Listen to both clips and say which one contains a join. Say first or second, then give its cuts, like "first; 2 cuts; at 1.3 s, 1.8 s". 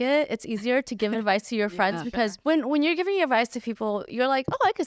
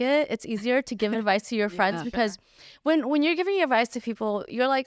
first; 1 cut; at 2.4 s